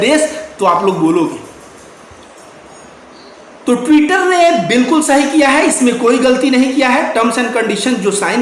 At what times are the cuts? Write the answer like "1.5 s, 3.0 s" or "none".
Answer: none